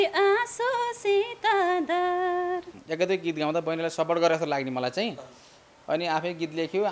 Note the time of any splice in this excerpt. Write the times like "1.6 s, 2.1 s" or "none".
2.7 s